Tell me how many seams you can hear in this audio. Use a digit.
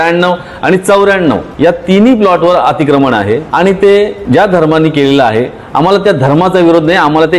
3